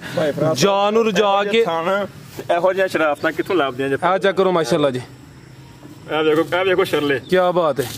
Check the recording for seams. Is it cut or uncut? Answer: uncut